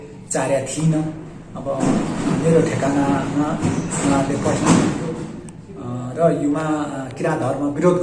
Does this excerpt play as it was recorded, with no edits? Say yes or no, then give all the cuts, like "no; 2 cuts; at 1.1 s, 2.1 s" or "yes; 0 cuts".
yes; 0 cuts